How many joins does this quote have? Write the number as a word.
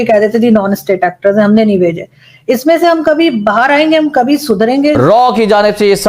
one